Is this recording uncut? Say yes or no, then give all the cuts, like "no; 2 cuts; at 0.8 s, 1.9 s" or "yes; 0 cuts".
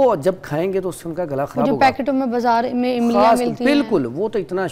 yes; 0 cuts